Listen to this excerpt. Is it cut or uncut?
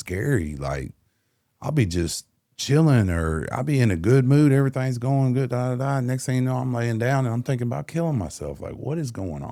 uncut